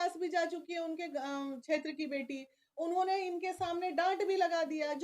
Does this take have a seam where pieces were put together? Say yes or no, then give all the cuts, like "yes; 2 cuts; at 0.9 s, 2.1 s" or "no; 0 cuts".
no; 0 cuts